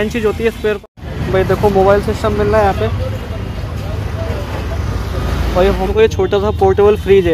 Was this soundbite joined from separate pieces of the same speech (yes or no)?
yes